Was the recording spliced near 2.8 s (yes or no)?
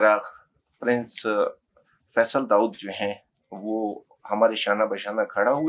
no